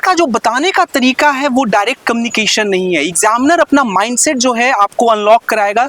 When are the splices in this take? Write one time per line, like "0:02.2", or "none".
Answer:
none